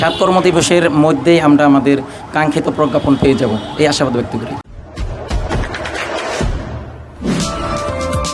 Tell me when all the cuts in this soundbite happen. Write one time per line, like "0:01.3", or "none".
none